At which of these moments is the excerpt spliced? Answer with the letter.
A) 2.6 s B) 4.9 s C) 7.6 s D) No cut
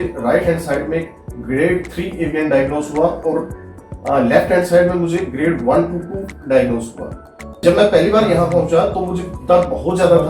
C